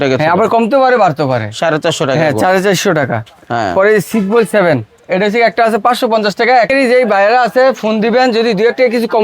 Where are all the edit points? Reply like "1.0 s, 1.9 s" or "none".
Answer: 6.7 s